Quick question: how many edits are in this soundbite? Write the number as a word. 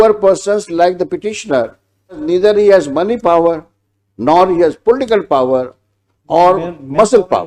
one